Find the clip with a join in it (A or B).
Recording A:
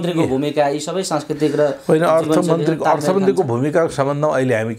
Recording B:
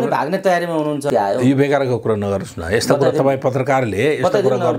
B